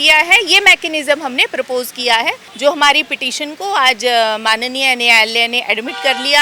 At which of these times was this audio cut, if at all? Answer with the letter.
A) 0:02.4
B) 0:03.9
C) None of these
A